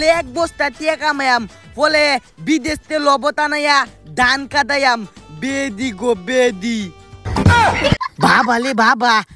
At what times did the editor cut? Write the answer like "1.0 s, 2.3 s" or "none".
8.1 s